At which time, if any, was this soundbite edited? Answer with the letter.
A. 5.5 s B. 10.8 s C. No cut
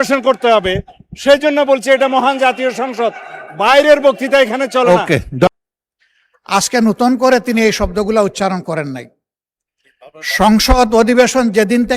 A